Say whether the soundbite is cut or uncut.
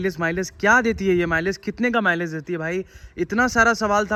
uncut